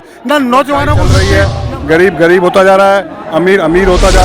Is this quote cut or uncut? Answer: cut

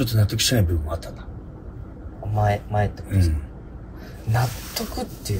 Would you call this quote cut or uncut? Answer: uncut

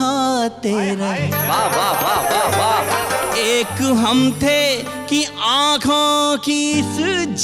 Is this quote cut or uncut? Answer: uncut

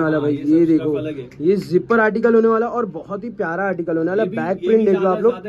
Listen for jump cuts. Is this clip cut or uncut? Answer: uncut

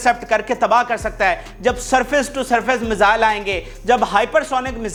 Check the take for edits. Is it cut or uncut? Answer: uncut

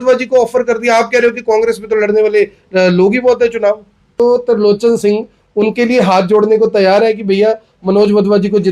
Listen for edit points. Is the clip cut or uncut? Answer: cut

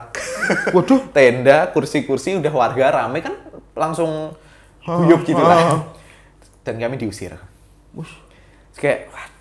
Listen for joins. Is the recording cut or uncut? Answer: uncut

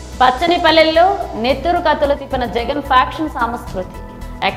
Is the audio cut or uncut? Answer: uncut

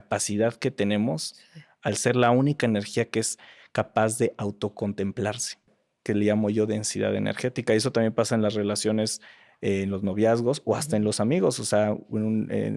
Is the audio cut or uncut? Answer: cut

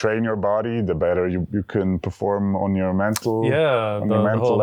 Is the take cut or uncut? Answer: uncut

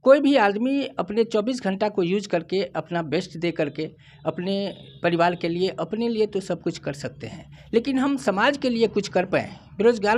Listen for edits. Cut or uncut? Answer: uncut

